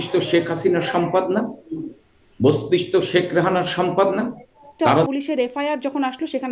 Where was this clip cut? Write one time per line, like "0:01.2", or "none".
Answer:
0:05.1